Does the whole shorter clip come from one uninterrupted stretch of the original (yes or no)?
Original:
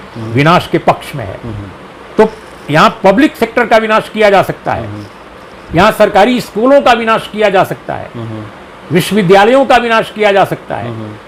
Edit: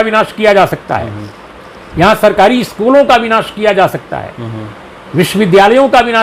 yes